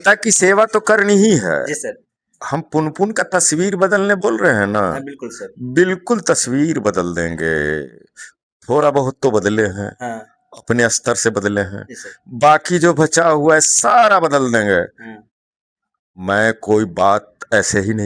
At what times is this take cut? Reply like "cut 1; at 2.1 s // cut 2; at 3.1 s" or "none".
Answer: none

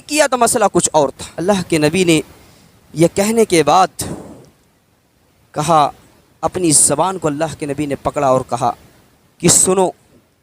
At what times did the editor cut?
cut 1; at 1.3 s

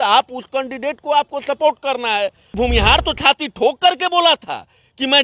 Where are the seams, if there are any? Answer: cut 1; at 2.6 s

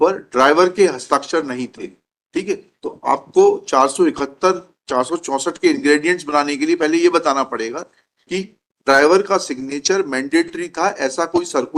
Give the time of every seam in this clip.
none

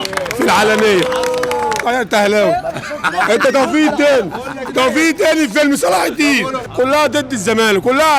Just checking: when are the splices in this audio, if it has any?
cut 1; at 1.8 s // cut 2; at 6.6 s

